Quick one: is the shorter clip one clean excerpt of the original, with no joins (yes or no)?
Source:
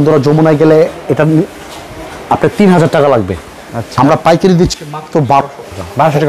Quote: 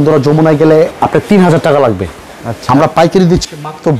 no